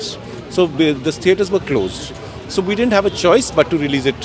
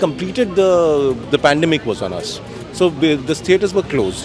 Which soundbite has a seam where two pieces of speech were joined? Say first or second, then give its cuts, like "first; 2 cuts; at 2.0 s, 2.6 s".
second; 1 cut; at 1.2 s